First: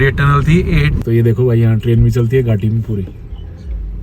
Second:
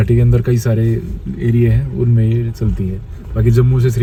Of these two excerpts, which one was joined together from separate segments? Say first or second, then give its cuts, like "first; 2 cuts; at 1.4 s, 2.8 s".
first; 1 cut; at 1.0 s